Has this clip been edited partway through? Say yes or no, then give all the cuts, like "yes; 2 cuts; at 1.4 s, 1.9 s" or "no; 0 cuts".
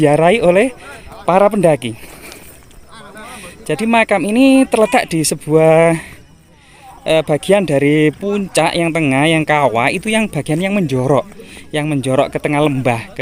no; 0 cuts